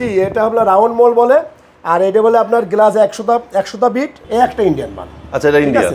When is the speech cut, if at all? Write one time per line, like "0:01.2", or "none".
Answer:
0:04.2

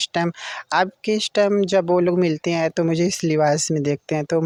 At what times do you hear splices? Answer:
none

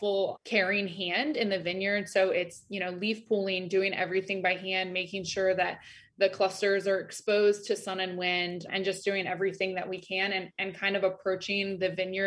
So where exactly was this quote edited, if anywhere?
none

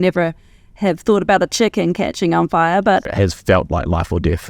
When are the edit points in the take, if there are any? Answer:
0:03.1

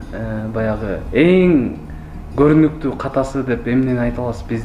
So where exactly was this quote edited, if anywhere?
none

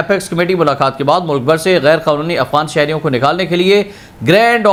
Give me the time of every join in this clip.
none

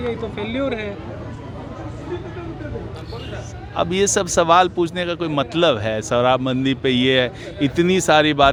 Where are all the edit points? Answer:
none

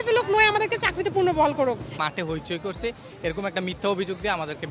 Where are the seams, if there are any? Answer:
0:01.9

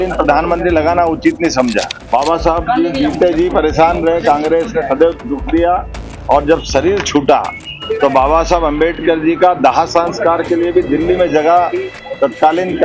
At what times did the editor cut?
0:02.0

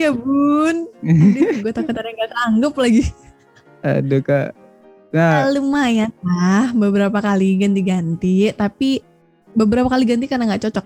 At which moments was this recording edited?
none

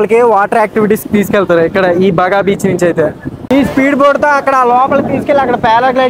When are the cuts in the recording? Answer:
0:03.3

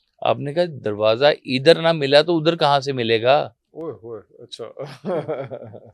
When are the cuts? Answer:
none

